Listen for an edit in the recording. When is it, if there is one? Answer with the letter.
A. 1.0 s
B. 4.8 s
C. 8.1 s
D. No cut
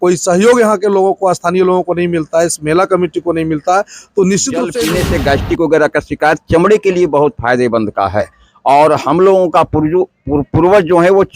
B